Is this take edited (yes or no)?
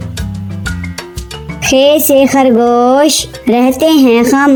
no